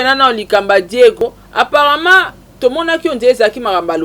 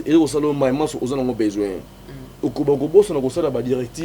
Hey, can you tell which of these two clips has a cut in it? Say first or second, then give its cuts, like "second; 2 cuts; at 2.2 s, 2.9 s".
first; 1 cut; at 1.2 s